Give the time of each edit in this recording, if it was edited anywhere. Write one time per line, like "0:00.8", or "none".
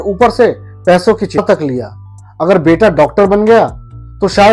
0:01.4